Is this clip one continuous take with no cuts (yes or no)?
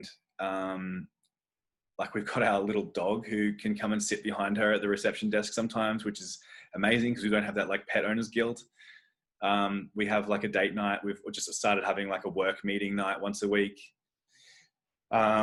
yes